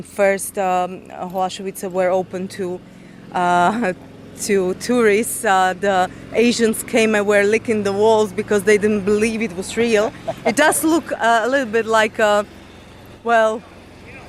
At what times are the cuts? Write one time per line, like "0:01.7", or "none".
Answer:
none

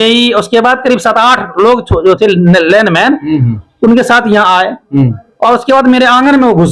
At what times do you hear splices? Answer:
none

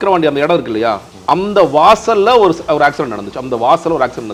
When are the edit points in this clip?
none

